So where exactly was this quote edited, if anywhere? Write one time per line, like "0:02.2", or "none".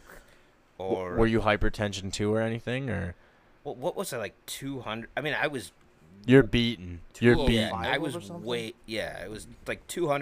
none